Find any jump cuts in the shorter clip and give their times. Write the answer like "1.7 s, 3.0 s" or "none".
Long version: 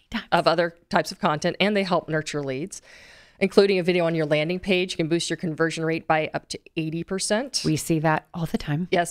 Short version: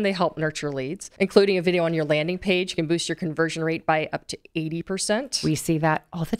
1.0 s